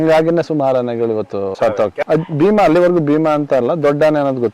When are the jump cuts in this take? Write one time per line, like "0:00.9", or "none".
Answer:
0:02.0